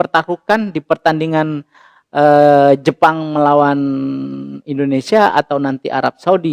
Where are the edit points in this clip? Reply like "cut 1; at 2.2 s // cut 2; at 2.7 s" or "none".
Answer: none